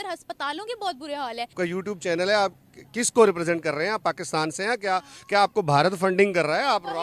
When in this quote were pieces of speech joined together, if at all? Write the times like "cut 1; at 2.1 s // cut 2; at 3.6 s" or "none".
cut 1; at 1.5 s